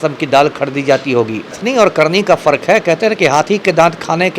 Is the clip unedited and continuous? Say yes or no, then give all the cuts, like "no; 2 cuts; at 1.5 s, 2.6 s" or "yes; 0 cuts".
no; 1 cut; at 1.6 s